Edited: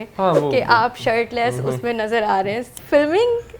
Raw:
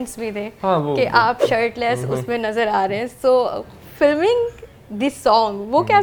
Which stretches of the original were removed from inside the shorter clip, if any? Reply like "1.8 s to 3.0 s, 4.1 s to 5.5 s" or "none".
3.1 s to 3.7 s